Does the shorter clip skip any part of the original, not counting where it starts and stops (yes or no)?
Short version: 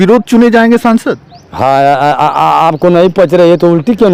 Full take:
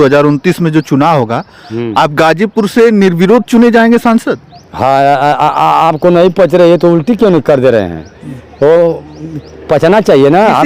no